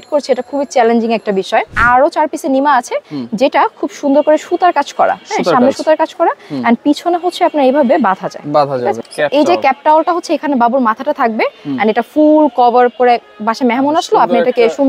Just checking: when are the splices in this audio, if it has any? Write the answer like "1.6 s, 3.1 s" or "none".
1.7 s, 9.1 s